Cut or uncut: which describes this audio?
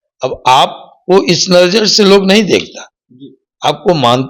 uncut